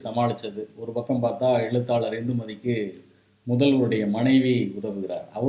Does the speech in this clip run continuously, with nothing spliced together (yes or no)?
yes